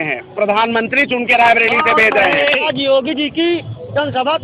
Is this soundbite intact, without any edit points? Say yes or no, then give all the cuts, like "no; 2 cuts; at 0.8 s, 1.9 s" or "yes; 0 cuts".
no; 1 cut; at 2.7 s